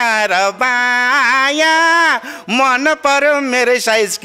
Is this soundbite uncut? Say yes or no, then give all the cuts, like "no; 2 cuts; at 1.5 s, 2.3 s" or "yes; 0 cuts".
yes; 0 cuts